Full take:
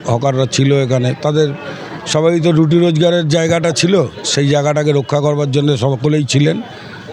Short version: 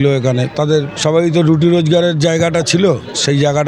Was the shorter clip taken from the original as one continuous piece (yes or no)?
no